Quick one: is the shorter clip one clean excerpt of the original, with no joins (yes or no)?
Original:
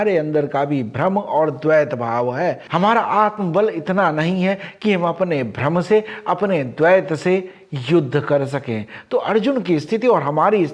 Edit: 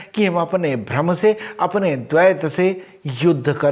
yes